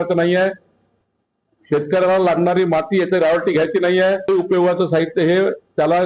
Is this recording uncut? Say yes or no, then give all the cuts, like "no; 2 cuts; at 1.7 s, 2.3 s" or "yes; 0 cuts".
no; 1 cut; at 4.3 s